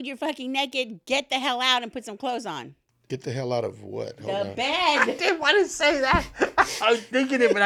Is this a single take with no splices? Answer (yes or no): yes